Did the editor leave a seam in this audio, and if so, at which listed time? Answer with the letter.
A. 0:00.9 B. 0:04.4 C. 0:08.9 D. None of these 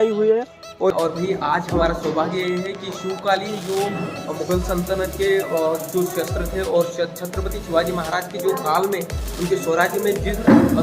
A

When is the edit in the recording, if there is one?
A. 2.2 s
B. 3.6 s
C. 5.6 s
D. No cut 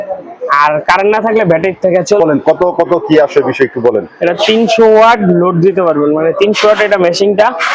A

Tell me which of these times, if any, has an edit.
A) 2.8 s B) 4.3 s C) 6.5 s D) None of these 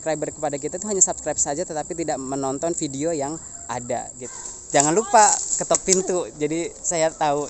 B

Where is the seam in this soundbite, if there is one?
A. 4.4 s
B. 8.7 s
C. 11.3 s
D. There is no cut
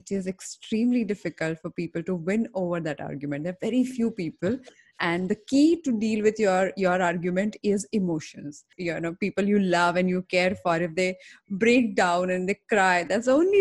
B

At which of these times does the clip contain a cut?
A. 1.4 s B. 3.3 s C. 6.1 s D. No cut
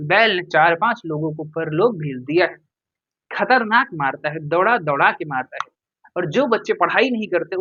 D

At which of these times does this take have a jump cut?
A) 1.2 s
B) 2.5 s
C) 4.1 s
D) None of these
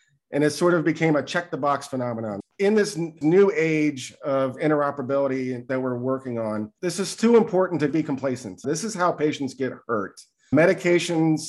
B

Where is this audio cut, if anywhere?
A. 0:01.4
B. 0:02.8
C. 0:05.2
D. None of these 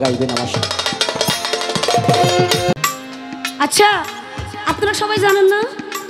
B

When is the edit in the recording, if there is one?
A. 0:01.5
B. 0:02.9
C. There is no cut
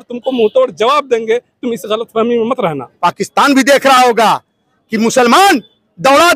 B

